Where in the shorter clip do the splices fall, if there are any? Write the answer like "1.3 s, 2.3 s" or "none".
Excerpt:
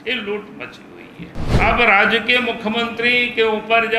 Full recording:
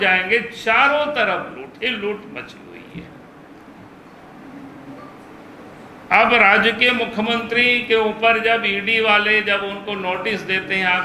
1.4 s